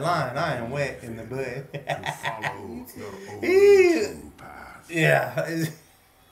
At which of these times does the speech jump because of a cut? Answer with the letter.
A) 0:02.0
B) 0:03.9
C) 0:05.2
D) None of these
D